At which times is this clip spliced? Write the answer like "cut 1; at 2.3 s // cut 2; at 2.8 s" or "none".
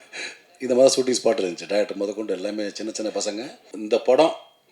cut 1; at 3.7 s